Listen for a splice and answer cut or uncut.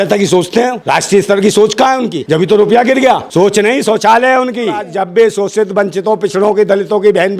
cut